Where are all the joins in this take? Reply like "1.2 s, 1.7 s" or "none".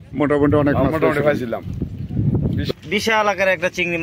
2.7 s